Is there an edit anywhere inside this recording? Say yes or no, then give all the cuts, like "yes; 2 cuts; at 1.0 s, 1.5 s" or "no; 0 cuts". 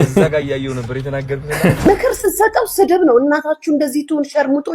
yes; 1 cut; at 1.9 s